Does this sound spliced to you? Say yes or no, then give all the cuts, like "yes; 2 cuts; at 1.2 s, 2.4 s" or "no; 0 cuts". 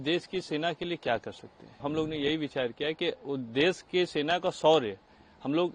yes; 1 cut; at 1.8 s